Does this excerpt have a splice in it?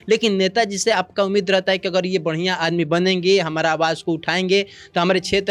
no; 0 cuts

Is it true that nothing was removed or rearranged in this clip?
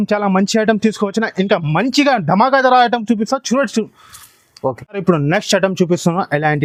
yes; 0 cuts

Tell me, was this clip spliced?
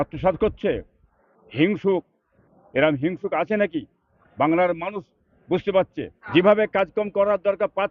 yes; 1 cut; at 6.2 s

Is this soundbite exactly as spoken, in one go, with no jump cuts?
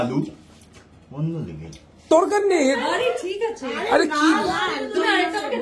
no; 1 cut; at 2.1 s

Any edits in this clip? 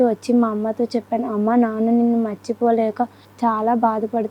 yes; 1 cut; at 3.2 s

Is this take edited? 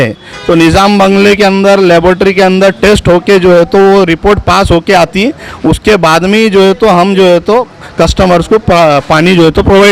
no; 0 cuts

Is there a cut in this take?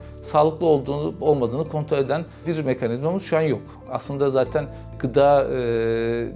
no; 0 cuts

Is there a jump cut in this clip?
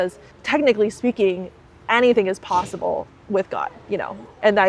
no; 0 cuts

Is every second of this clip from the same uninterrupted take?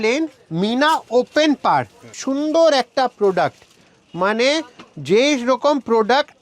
no; 1 cut; at 2.1 s

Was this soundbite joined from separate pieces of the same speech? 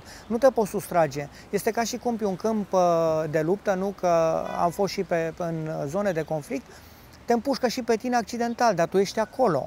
no; 0 cuts

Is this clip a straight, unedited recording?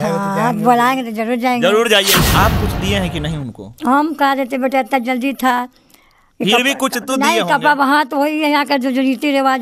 no; 1 cut; at 2.2 s

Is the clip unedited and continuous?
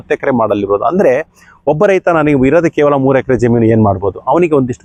yes; 0 cuts

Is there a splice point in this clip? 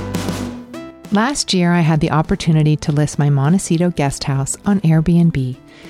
yes; 1 cut; at 1.0 s

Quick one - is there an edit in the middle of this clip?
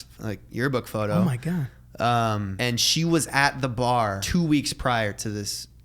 yes; 2 cuts; at 2.5 s, 4.2 s

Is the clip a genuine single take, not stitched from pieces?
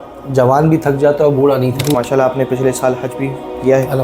no; 1 cut; at 1.9 s

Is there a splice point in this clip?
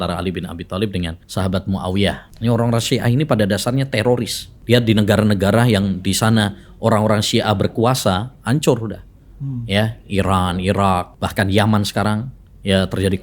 yes; 4 cuts; at 1.2 s, 2.3 s, 4.5 s, 11.2 s

